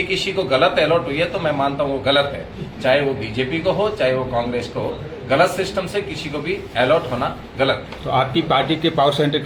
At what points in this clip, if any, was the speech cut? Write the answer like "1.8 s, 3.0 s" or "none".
none